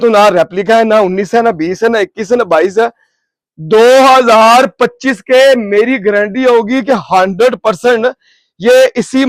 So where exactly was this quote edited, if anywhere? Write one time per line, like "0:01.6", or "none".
none